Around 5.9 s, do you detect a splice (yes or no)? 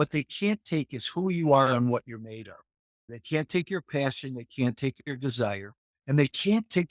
no